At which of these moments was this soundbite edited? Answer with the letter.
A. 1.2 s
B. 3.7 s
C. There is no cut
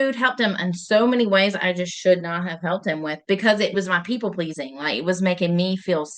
B